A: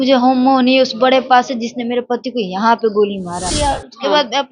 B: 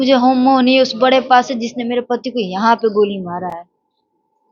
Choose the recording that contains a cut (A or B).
A